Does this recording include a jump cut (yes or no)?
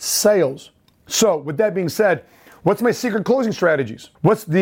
no